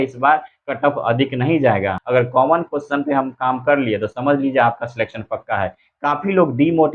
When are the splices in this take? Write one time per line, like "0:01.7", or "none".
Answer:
0:02.0